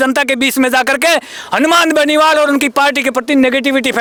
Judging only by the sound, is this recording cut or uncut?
uncut